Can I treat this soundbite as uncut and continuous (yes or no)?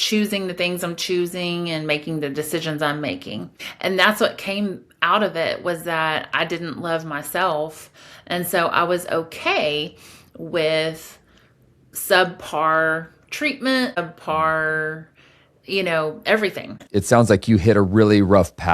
no